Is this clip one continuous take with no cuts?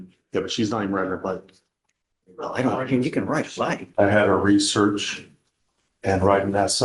no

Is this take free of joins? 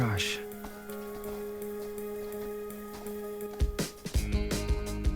yes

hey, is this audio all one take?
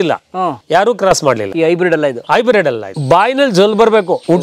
no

